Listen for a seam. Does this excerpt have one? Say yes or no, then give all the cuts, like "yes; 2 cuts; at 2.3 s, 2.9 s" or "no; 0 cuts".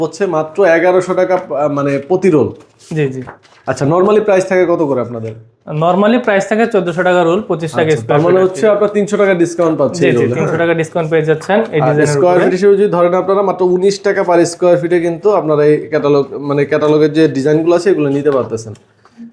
no; 0 cuts